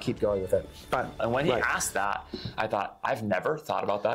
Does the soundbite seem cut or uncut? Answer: cut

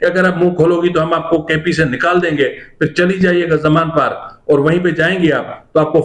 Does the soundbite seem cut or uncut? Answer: uncut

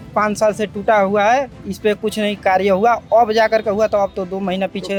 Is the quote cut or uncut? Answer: uncut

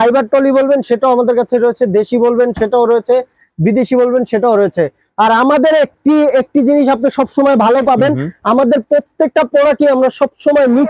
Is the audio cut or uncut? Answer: uncut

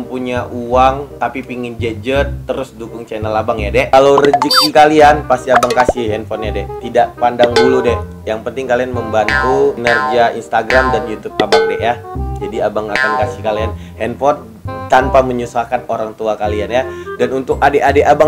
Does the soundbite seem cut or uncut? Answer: cut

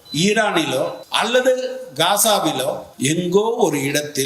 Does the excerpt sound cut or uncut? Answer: cut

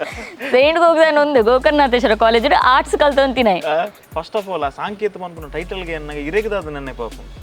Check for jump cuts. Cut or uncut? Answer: cut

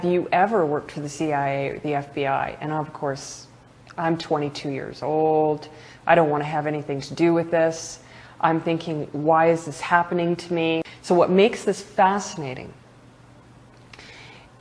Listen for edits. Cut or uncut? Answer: cut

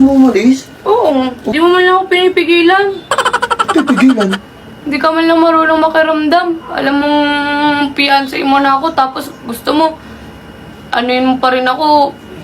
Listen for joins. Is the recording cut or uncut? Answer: cut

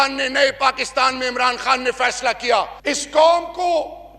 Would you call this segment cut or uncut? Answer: cut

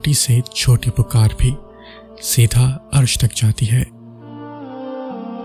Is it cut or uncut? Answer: cut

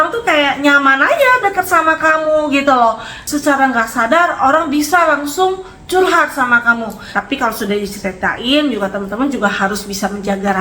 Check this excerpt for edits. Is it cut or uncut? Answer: cut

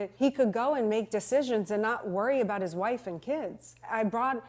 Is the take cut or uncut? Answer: uncut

